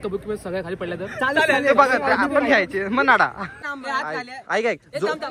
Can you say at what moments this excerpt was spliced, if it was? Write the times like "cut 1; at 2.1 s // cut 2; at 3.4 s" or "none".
cut 1; at 3.6 s